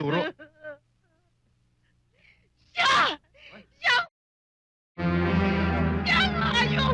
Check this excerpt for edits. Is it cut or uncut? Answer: uncut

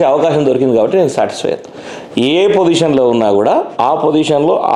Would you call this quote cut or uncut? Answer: uncut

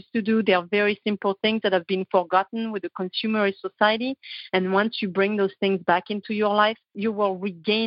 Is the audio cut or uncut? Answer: cut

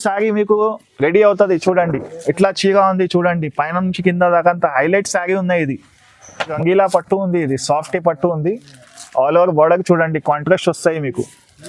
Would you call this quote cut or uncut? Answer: cut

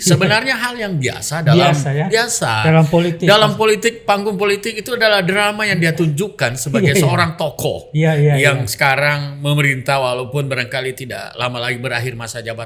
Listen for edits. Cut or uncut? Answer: uncut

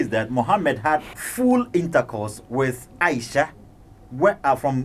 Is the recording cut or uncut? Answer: cut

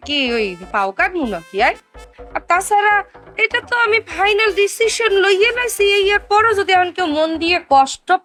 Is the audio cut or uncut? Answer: uncut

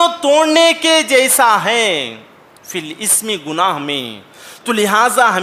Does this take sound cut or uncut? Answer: uncut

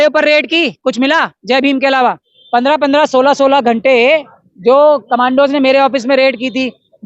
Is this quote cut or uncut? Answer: cut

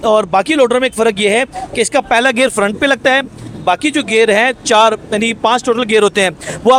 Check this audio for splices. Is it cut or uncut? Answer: uncut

